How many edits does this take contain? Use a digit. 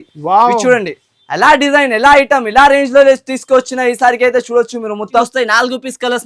1